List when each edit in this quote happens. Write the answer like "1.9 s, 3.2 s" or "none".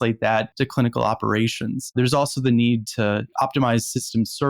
1.9 s